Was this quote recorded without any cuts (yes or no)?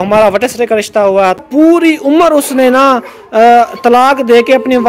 no